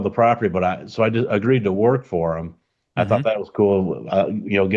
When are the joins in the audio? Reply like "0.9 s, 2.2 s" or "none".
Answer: none